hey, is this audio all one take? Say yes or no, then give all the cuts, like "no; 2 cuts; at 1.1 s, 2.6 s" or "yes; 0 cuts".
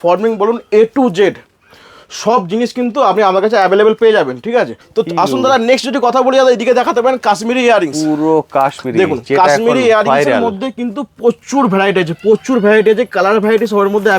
no; 1 cut; at 4.8 s